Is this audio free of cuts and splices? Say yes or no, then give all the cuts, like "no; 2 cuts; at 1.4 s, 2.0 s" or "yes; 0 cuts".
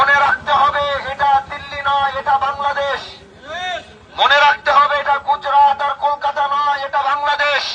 yes; 0 cuts